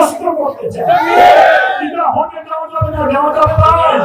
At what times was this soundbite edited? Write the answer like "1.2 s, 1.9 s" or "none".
none